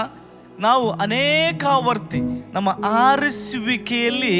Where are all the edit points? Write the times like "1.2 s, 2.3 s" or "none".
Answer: 2.4 s